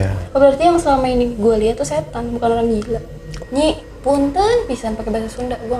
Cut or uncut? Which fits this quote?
cut